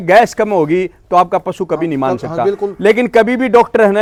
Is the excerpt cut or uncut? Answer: uncut